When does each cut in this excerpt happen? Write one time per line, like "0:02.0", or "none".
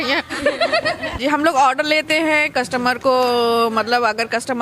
0:01.2